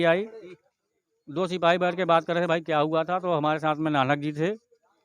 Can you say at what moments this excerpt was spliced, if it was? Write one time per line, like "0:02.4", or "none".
none